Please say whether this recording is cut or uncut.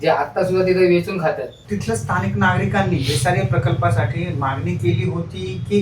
cut